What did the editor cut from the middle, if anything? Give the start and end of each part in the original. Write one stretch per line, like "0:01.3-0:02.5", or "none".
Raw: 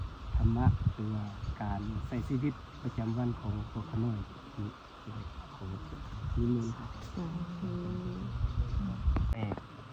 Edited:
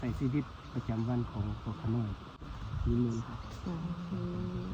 0:04.5-0:05.9